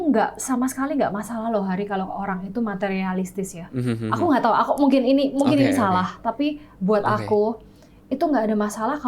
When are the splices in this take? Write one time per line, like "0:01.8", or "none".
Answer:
0:03.6